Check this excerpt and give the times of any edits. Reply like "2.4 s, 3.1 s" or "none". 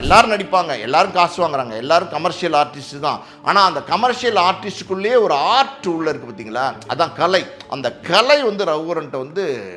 none